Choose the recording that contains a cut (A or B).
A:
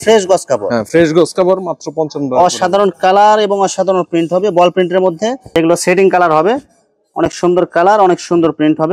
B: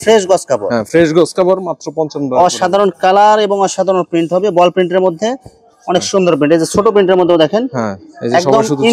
A